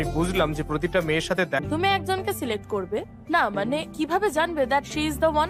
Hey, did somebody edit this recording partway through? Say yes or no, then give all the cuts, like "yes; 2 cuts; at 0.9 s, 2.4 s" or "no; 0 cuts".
yes; 1 cut; at 1.6 s